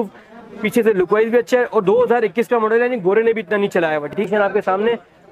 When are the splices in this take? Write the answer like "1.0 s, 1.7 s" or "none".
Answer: 4.2 s